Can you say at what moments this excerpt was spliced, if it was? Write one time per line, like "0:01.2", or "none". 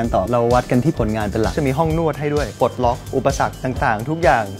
0:01.5
0:02.5

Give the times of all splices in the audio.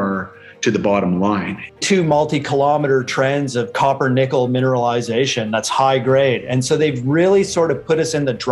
0:01.7

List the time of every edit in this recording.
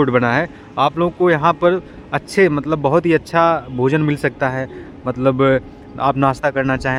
none

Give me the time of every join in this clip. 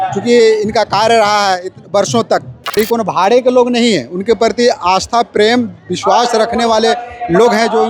0:02.8

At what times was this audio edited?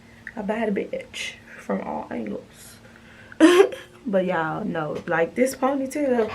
none

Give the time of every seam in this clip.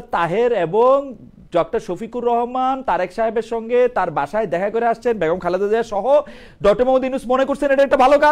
none

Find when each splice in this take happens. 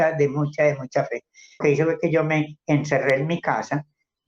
0:01.6

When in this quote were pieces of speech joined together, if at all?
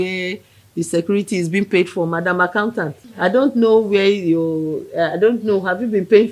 0:03.0

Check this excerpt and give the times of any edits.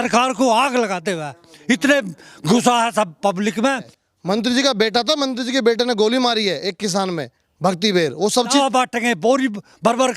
0:03.9
0:08.5

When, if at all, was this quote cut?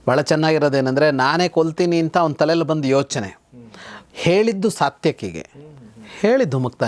none

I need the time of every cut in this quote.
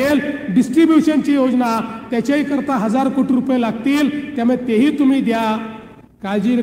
none

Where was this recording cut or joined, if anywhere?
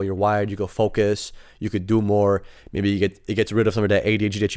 none

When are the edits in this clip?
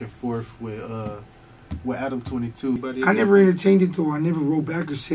0:02.9

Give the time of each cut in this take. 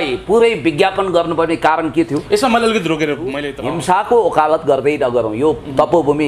0:03.5

